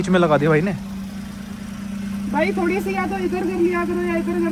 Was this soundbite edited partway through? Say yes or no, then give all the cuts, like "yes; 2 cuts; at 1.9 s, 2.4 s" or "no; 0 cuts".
no; 0 cuts